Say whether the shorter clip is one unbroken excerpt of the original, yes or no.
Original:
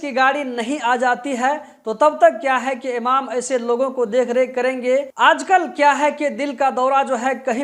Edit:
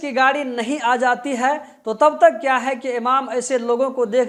yes